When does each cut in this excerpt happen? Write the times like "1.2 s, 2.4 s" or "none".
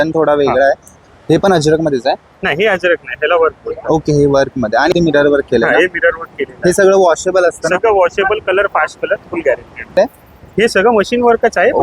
0.9 s, 4.9 s, 10.0 s